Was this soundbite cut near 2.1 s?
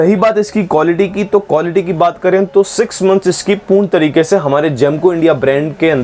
no; 0 cuts

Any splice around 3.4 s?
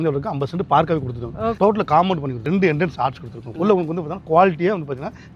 yes; 3 cuts; at 1.5 s, 2.3 s, 3.4 s

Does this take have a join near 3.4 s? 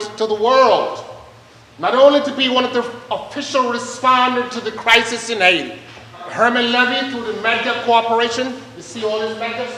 no; 1 cut; at 6.2 s

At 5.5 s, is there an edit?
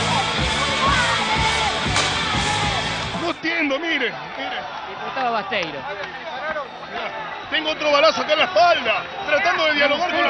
no; 1 cut; at 3.1 s

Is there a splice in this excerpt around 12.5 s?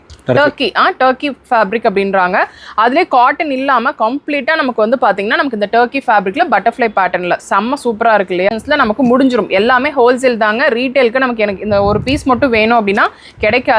no; 1 cut; at 8.5 s

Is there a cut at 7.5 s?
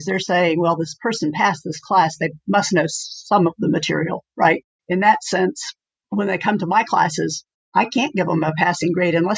no; 1 cut; at 4.7 s

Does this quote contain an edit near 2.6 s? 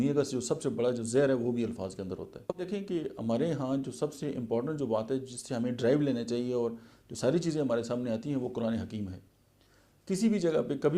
yes; 1 cut; at 2.6 s

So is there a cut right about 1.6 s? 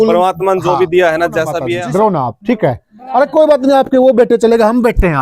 yes; 1 cut; at 1.6 s

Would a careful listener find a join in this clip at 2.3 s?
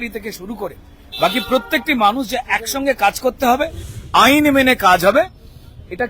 no; 1 cut; at 3.9 s

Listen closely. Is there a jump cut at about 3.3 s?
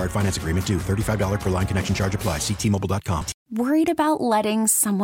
yes; 1 cut; at 3.3 s

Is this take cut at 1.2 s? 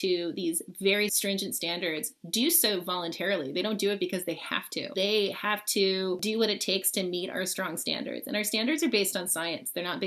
yes; 3 cuts; at 1.2 s, 4.9 s, 6.2 s

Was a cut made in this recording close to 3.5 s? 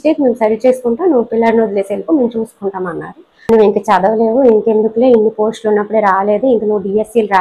yes; 1 cut; at 3.5 s

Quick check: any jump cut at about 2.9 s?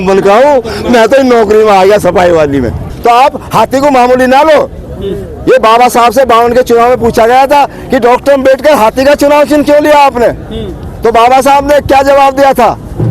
yes; 1 cut; at 2.9 s

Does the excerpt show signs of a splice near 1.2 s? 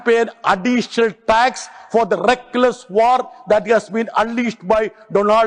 no; 0 cuts

